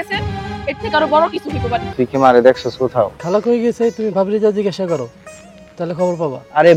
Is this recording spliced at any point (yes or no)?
yes